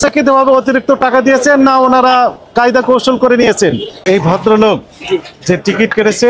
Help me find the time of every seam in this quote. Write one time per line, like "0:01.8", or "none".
0:03.9